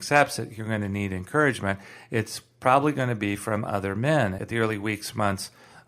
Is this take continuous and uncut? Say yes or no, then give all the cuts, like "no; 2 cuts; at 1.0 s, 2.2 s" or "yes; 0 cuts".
no; 1 cut; at 4.4 s